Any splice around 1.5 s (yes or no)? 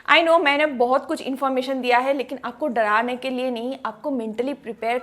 no